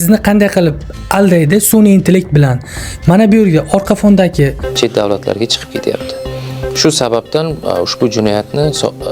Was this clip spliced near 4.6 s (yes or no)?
yes